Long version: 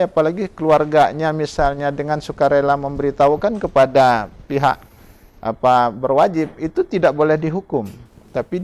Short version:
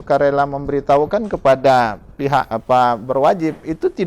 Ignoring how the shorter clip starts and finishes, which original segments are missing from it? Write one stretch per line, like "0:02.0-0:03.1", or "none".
0:04.8-0:05.5